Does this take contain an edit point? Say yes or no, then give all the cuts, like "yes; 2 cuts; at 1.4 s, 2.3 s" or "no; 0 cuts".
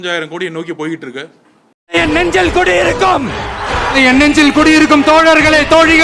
yes; 1 cut; at 1.6 s